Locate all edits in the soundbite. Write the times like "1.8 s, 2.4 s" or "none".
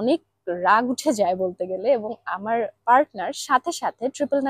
none